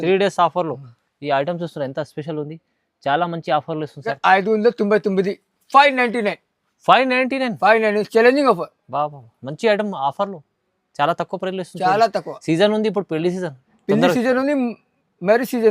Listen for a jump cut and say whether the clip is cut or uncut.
cut